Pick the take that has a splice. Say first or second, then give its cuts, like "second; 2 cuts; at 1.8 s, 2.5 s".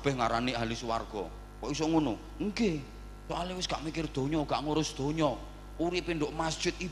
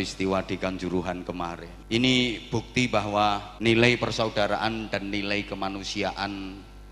second; 2 cuts; at 1.7 s, 3.5 s